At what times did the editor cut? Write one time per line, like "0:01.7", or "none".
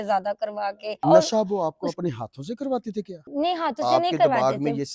0:01.0
0:03.2